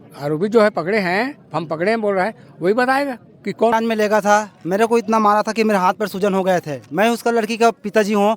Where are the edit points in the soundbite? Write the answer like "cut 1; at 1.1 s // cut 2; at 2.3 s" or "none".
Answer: cut 1; at 3.7 s